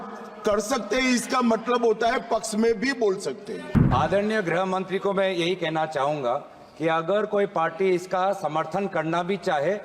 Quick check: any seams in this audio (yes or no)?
yes